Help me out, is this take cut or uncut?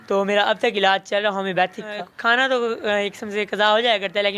cut